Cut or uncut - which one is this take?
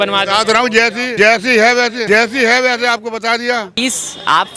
cut